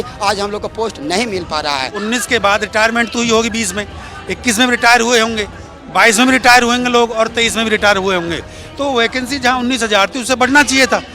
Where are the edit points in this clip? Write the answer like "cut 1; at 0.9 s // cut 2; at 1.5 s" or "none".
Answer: cut 1; at 2.0 s